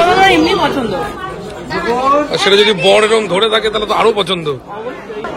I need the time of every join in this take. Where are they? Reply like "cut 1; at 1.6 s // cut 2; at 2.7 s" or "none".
none

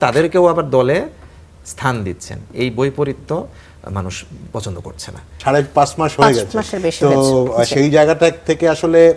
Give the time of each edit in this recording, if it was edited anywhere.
cut 1; at 5.3 s

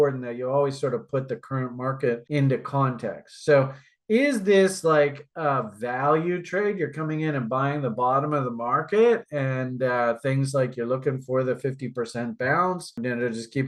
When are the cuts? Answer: none

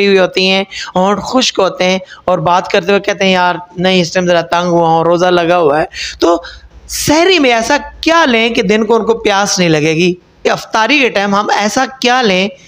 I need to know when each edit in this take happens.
cut 1; at 10.4 s

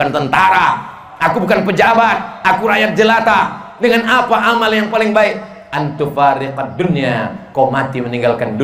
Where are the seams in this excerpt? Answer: none

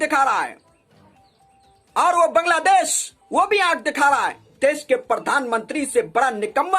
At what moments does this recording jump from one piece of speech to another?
cut 1; at 4.5 s

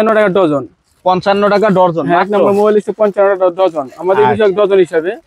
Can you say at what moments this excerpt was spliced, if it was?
none

